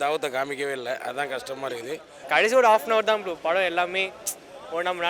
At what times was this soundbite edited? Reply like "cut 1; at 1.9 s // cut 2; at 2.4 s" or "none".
cut 1; at 2.1 s